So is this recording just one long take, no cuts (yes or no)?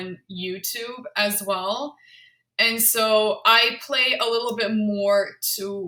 yes